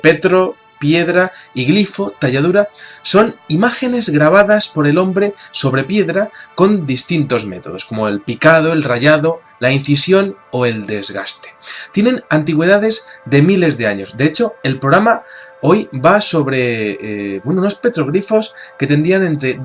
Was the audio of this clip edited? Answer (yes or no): yes